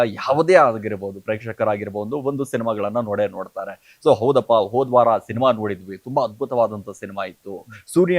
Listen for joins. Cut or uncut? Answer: uncut